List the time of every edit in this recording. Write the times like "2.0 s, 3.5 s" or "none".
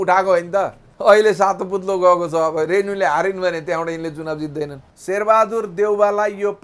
0.9 s, 4.9 s